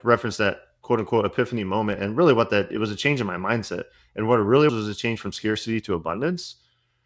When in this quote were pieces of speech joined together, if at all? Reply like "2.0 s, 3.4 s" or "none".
4.7 s